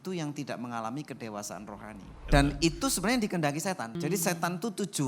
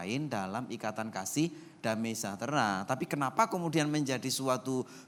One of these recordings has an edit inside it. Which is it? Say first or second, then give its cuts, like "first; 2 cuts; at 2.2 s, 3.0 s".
first; 2 cuts; at 2.1 s, 4.0 s